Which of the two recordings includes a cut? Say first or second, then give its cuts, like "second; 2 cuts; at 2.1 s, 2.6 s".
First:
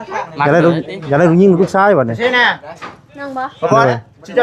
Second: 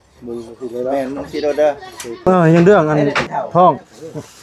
second; 1 cut; at 2.3 s